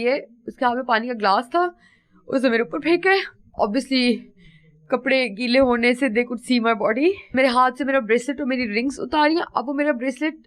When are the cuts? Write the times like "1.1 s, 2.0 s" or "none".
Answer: 3.5 s, 7.3 s